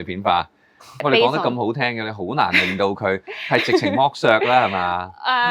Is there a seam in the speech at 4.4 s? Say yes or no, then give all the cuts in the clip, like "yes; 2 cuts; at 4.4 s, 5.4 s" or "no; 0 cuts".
no; 1 cut; at 1.0 s